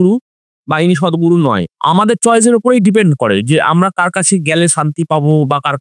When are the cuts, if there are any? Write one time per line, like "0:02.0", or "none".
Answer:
0:01.7